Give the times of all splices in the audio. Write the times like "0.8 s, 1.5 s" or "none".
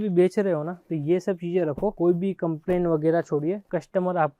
none